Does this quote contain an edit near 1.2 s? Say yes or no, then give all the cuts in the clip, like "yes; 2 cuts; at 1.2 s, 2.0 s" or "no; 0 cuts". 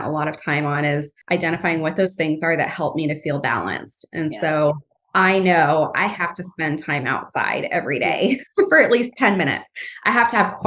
yes; 1 cut; at 1.2 s